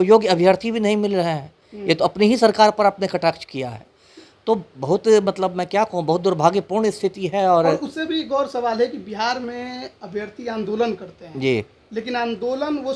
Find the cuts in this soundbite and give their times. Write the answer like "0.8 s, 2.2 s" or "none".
none